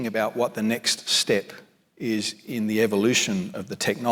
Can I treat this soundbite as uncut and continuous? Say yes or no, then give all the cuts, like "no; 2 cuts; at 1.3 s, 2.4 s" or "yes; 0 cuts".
yes; 0 cuts